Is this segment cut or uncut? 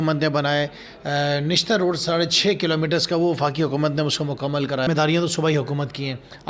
cut